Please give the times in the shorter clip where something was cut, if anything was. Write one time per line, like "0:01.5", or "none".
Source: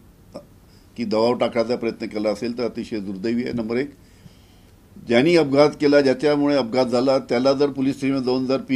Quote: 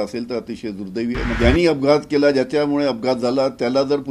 0:01.4